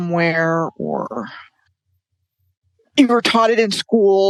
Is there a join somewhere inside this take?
no; 0 cuts

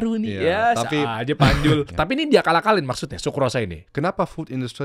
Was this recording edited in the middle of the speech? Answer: yes; 2 cuts; at 1.9 s, 3.8 s

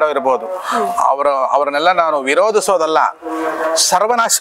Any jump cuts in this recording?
no; 0 cuts

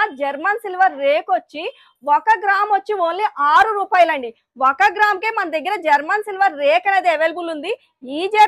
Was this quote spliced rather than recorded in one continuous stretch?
no; 0 cuts

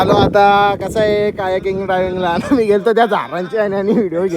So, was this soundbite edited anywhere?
no; 0 cuts

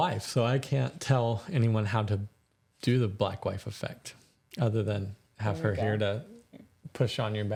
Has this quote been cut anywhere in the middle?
no; 0 cuts

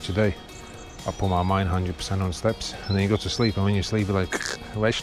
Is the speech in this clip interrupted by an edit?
yes; 1 cut; at 2.8 s

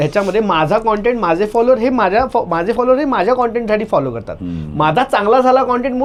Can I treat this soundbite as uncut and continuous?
yes; 0 cuts

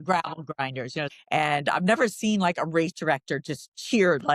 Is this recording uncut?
no; 1 cut; at 1.1 s

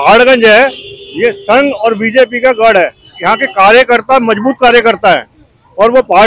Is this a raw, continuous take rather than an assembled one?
yes; 0 cuts

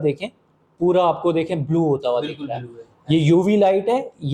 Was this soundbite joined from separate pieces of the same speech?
no; 0 cuts

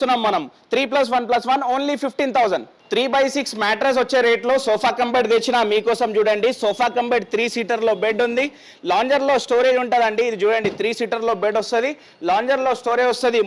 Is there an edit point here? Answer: no; 0 cuts

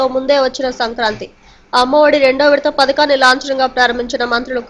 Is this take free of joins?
yes; 0 cuts

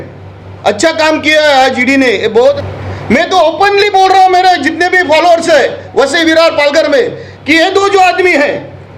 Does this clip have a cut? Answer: yes; 1 cut; at 2.6 s

